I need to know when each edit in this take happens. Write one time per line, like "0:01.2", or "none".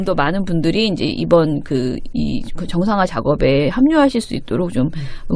0:02.2